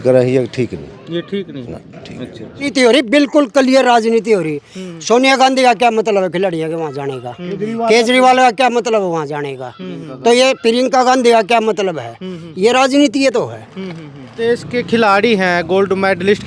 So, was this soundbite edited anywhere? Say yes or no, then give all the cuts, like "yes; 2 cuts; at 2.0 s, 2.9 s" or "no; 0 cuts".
yes; 2 cuts; at 2.7 s, 14.3 s